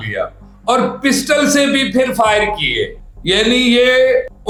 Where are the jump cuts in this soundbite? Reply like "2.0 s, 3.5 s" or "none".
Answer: none